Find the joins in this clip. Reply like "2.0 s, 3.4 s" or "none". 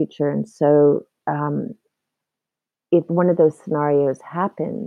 none